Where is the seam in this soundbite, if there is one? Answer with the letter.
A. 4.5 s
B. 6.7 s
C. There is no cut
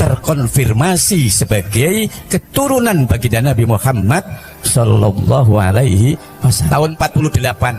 B